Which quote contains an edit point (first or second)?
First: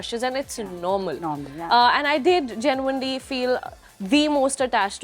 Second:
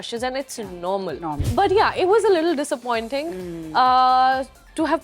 second